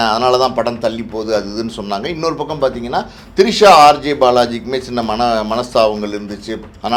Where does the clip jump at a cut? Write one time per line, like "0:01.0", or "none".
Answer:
none